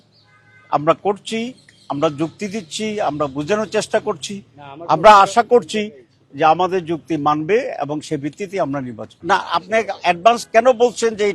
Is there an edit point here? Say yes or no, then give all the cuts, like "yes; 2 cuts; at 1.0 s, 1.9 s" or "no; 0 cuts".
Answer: yes; 1 cut; at 9.1 s